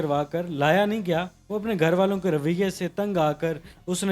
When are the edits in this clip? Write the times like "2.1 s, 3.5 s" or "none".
1.4 s